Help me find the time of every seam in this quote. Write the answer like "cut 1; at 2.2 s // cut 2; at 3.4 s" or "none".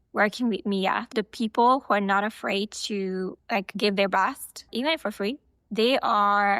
cut 1; at 1.0 s